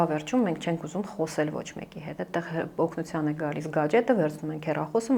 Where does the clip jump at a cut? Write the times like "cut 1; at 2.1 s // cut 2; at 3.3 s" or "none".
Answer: none